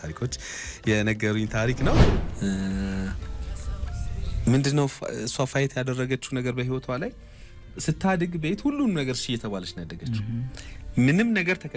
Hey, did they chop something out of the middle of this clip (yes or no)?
yes